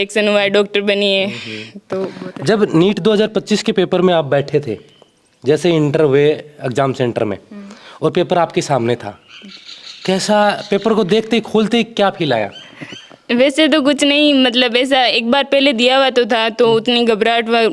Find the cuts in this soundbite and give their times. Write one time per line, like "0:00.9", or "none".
none